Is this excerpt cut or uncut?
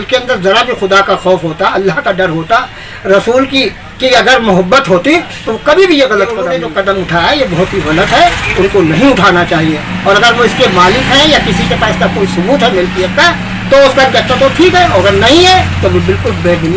uncut